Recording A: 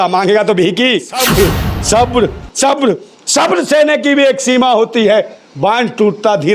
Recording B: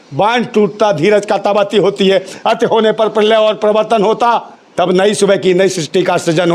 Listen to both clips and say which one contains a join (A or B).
A